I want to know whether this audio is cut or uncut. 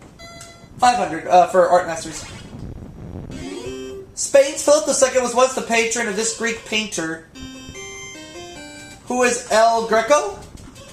cut